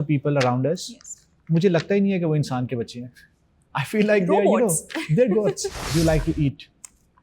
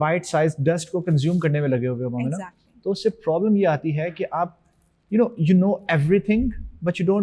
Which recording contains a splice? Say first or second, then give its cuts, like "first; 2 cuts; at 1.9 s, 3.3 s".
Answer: first; 1 cut; at 5.8 s